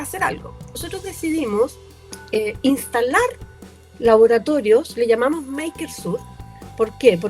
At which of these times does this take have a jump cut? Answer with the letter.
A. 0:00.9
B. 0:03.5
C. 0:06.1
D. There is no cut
A